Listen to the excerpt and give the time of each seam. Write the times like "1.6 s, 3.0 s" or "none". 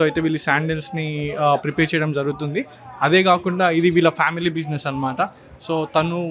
none